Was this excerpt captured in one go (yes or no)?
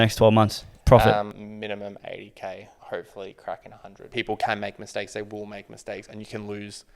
no